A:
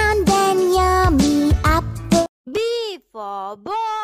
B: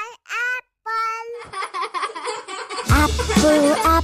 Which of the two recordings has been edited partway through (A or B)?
B